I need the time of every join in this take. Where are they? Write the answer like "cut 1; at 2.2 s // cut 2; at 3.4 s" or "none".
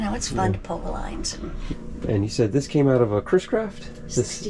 cut 1; at 1.6 s